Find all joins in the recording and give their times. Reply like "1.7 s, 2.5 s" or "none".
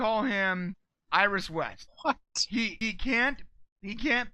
0.9 s, 1.8 s, 2.8 s